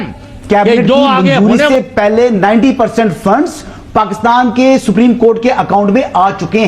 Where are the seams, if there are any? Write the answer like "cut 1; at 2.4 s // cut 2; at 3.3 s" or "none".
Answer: cut 1; at 1.4 s